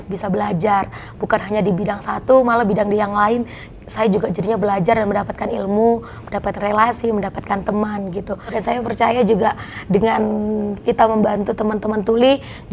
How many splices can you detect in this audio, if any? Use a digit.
1